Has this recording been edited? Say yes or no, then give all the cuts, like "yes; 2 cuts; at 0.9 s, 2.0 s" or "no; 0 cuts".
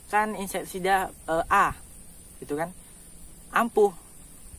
no; 0 cuts